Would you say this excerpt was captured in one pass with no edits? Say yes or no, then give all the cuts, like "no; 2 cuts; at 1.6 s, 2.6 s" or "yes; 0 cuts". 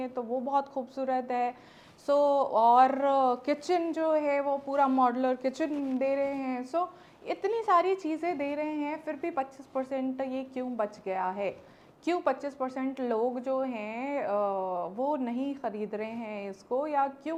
yes; 0 cuts